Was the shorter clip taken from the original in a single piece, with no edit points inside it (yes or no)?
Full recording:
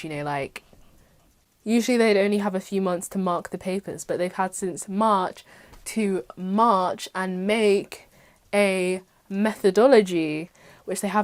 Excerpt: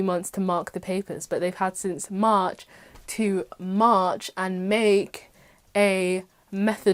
yes